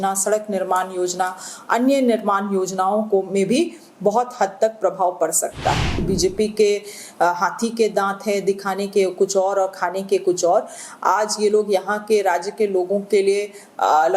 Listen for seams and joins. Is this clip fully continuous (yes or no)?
no